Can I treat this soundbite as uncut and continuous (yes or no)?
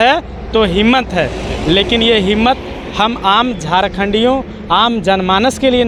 yes